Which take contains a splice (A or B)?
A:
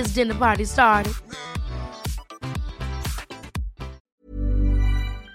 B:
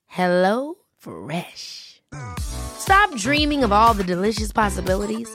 A